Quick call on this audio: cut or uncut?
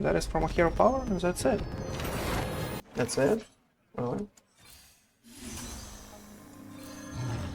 cut